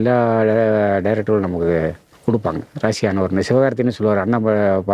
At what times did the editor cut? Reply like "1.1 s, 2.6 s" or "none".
2.1 s